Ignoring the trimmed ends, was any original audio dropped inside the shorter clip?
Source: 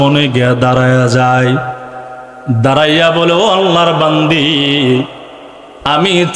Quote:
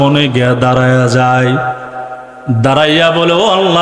no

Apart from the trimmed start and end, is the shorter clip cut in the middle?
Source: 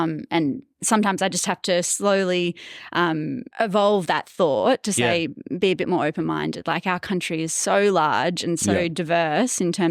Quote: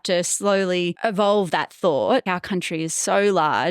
yes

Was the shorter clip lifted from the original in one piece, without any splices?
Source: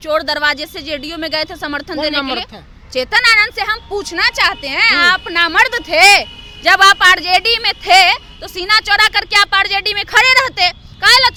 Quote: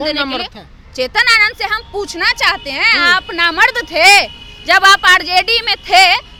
yes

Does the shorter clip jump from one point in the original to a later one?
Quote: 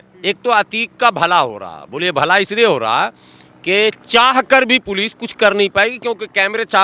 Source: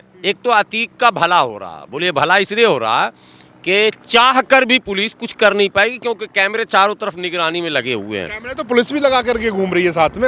no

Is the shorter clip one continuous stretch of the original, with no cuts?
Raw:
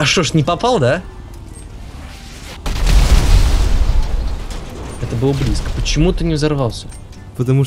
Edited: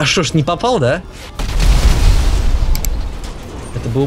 no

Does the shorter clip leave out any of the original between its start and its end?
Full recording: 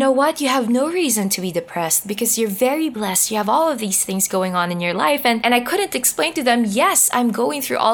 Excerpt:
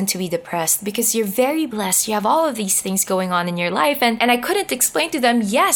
no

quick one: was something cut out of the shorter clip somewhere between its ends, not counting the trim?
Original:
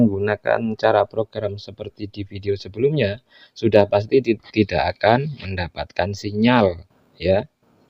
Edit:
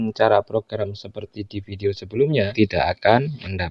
yes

